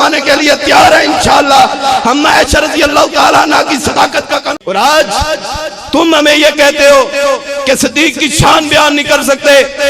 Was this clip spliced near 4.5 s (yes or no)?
yes